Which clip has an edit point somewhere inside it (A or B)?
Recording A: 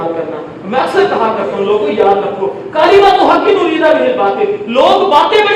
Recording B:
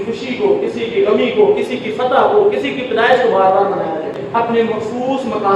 B